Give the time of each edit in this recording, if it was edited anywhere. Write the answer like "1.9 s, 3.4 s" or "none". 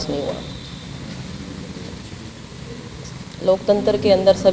2.0 s